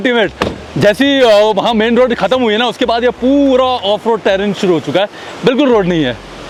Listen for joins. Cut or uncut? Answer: uncut